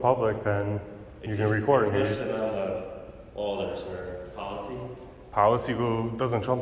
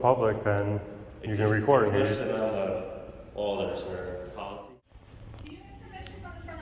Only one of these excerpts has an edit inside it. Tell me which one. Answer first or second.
second